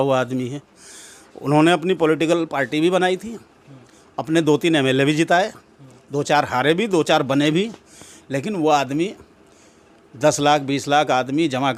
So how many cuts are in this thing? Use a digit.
0